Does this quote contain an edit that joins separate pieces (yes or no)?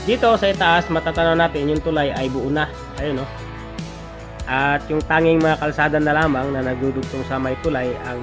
no